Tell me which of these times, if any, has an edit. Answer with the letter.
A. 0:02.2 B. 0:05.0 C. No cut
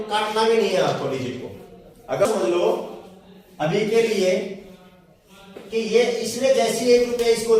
A